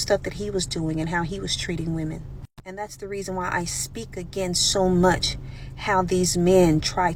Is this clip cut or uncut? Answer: uncut